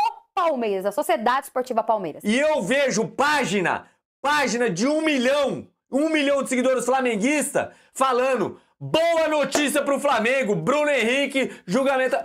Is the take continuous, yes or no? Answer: no